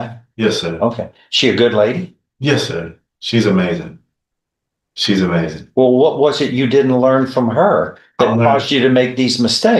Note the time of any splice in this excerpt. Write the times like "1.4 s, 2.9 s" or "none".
none